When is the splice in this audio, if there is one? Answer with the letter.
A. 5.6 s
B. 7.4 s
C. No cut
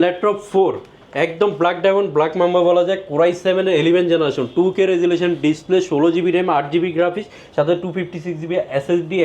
C